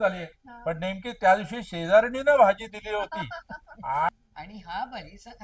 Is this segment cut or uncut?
cut